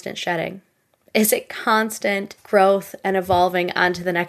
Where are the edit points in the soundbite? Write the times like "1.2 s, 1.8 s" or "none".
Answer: 2.3 s